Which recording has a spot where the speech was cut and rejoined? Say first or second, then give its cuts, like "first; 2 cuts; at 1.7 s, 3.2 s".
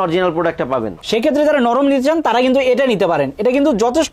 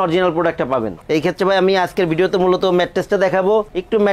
first; 1 cut; at 1.0 s